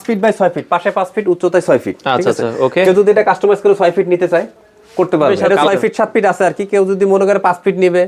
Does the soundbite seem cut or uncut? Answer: cut